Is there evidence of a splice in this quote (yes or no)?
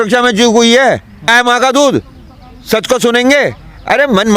yes